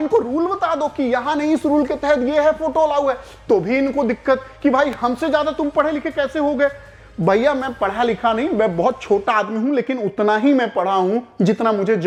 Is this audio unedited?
yes; 0 cuts

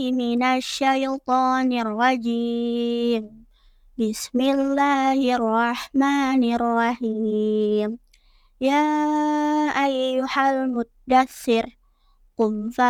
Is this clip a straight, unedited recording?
yes; 0 cuts

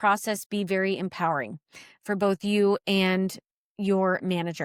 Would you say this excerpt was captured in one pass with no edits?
yes; 0 cuts

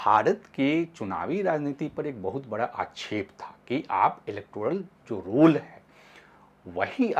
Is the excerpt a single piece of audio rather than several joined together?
yes; 0 cuts

